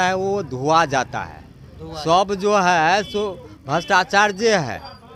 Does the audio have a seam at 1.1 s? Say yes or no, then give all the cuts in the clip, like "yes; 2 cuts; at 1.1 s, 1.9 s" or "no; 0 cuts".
no; 0 cuts